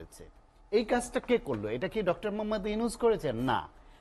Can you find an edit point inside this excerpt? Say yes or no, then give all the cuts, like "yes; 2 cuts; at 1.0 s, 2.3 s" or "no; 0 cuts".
no; 0 cuts